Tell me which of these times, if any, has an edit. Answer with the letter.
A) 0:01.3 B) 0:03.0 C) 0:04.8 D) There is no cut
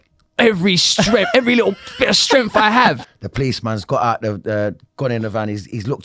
B